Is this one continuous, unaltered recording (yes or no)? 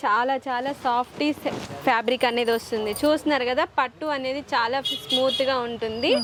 yes